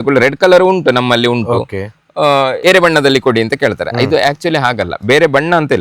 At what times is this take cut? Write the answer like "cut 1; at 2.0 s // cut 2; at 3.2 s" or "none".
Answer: cut 1; at 2.6 s